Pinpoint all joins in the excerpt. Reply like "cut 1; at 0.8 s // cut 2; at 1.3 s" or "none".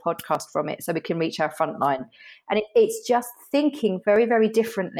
none

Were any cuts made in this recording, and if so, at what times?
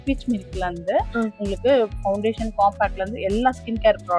none

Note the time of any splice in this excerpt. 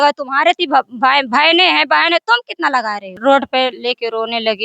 cut 1; at 3.1 s

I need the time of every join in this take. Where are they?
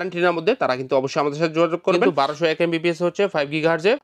cut 1; at 2.0 s

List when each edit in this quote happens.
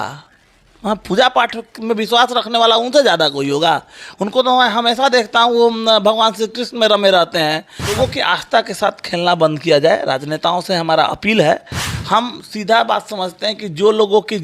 cut 1; at 7.9 s // cut 2; at 11.9 s

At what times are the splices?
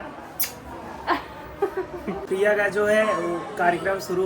cut 1; at 2.2 s

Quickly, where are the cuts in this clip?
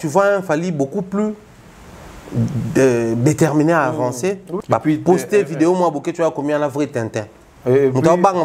cut 1; at 4.5 s

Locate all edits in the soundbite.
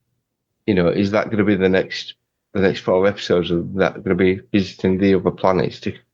none

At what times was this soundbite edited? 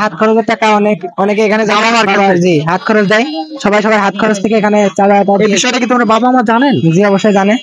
none

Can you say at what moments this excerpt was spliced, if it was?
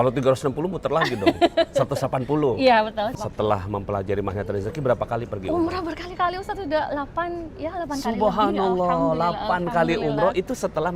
cut 1; at 3.1 s

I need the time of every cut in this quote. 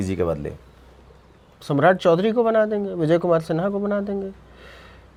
none

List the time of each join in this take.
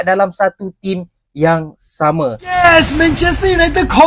cut 1; at 2.5 s

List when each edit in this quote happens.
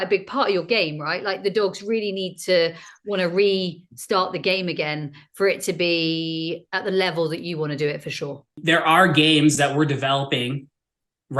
cut 1; at 8.5 s

